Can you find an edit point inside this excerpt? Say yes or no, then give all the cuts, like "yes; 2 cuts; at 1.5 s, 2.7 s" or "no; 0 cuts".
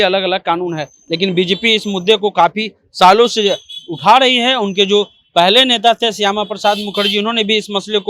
no; 0 cuts